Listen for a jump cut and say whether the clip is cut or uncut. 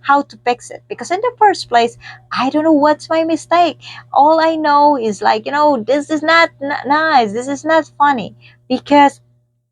uncut